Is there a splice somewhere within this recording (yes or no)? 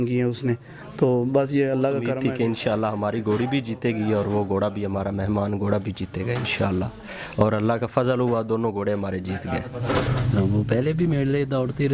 yes